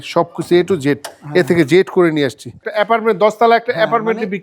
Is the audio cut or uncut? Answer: cut